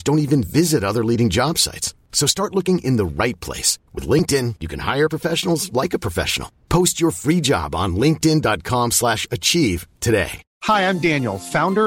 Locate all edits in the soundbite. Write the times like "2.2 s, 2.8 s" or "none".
10.5 s